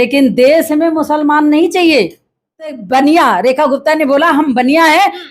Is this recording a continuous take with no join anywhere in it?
no; 1 cut; at 2.8 s

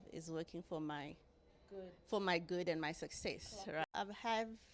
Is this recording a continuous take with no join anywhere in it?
no; 1 cut; at 3.8 s

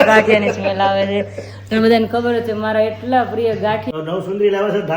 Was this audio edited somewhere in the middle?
yes; 1 cut; at 3.9 s

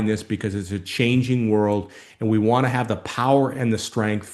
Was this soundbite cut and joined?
no; 0 cuts

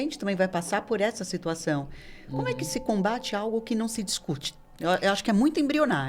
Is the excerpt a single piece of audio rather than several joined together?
yes; 0 cuts

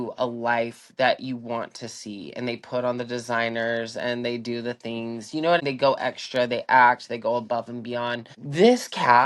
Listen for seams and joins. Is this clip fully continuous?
no; 2 cuts; at 5.6 s, 8.3 s

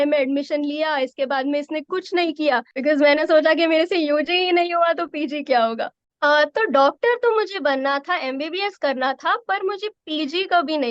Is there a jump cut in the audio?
yes; 2 cuts; at 2.7 s, 6.0 s

